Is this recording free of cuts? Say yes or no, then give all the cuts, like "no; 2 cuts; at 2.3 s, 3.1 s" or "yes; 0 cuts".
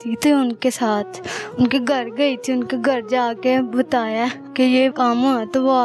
no; 1 cut; at 4.9 s